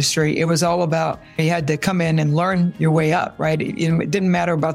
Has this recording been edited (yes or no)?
yes